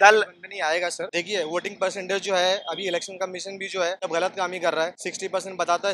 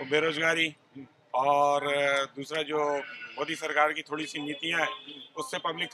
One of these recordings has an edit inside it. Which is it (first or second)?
first